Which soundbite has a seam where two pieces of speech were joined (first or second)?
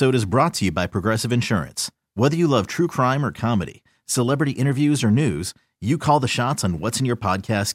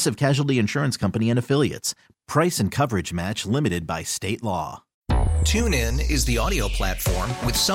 second